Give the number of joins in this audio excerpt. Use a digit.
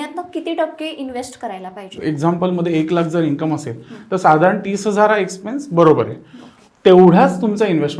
1